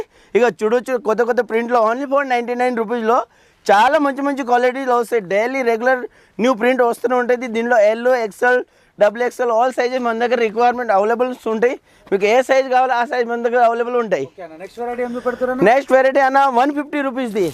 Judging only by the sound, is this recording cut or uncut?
uncut